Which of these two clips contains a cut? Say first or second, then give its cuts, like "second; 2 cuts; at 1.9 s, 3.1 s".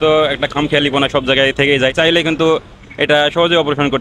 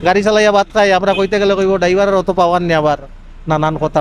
first; 1 cut; at 1.9 s